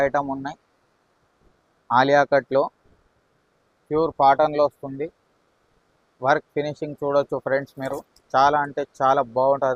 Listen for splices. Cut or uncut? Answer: uncut